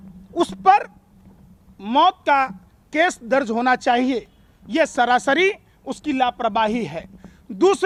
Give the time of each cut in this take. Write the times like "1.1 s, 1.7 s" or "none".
none